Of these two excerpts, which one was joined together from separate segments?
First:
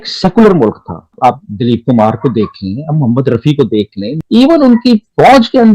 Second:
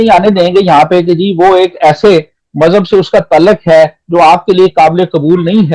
first; 1 cut; at 1.1 s

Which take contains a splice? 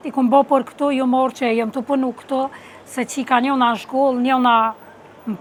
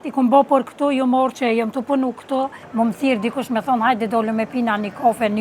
second; 1 cut; at 2.6 s

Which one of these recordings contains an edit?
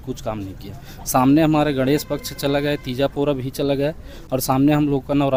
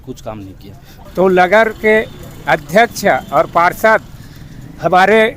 second; 1 cut; at 0.9 s

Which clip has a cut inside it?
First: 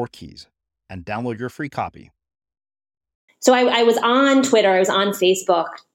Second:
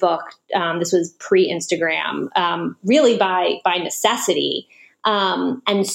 first; 1 cut; at 3.2 s

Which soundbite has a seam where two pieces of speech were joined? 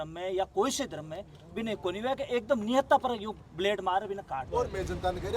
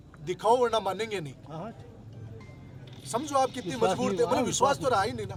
first; 1 cut; at 4.5 s

